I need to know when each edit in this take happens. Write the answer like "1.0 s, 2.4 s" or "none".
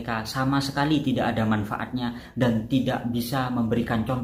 none